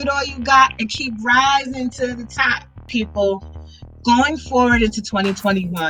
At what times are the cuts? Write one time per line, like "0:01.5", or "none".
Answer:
0:02.9